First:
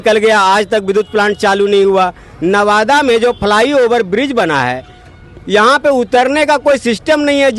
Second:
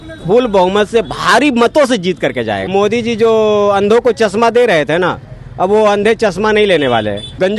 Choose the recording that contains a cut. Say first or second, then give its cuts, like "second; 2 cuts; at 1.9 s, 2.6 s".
second; 1 cut; at 2.7 s